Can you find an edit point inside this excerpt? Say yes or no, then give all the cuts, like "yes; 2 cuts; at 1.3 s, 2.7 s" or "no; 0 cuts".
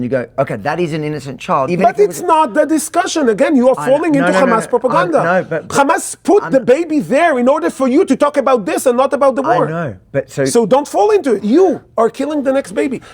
yes; 2 cuts; at 1.7 s, 11.4 s